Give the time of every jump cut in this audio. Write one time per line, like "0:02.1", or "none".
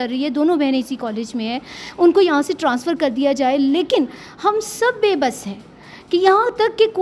none

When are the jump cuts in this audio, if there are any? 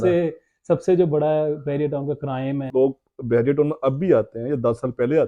0:02.7

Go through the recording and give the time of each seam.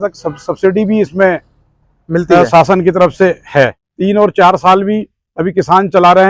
0:03.8

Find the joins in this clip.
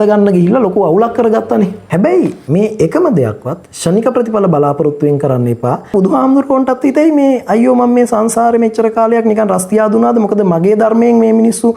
0:01.8
0:05.9

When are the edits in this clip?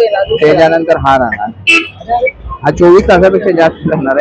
none

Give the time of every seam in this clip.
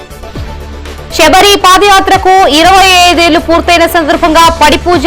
0:01.1

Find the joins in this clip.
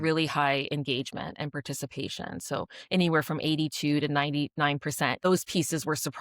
0:05.2

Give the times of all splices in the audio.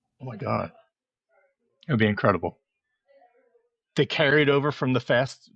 none

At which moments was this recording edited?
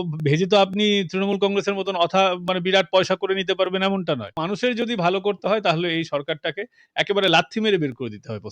0:04.4

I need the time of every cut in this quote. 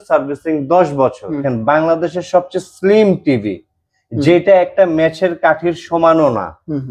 0:01.5

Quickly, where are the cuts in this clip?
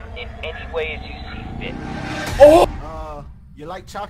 0:02.6

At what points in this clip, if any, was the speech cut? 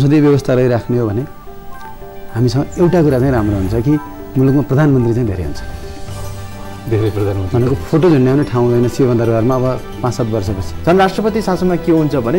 0:10.7

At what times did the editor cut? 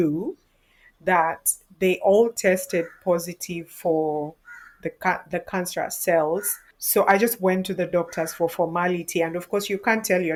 none

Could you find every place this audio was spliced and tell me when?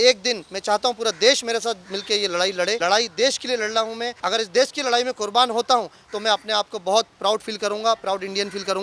0:02.8
0:04.1

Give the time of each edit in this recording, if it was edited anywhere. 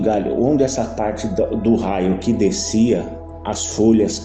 none

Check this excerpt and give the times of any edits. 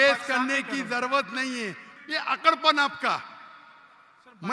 0:01.9

